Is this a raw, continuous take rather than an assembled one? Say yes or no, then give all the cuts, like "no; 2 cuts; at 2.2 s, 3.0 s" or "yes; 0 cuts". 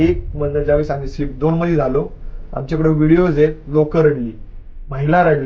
yes; 0 cuts